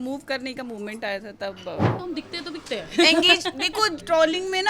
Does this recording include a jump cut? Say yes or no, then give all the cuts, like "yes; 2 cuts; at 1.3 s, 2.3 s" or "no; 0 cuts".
yes; 1 cut; at 1.9 s